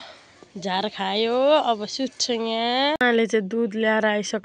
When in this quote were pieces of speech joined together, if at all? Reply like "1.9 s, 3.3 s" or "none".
3.0 s